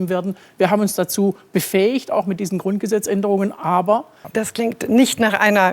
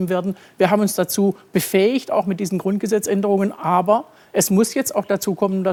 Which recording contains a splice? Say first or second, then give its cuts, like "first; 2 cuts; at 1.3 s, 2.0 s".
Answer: first; 1 cut; at 4.2 s